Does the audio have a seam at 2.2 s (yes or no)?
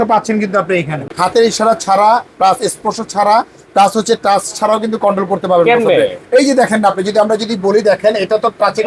no